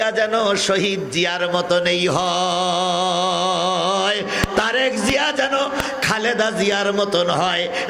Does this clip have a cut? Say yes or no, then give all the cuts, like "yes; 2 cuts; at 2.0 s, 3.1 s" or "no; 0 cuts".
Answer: no; 0 cuts